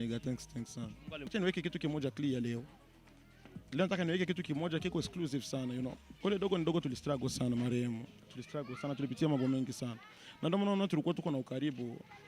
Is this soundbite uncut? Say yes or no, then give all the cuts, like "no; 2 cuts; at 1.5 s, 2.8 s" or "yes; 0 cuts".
no; 2 cuts; at 1.3 s, 6.1 s